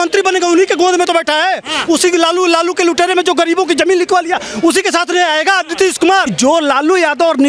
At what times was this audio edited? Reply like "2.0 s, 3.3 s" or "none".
6.3 s